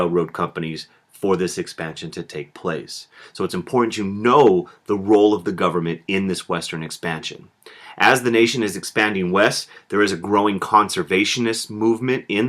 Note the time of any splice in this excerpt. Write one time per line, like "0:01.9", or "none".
0:02.5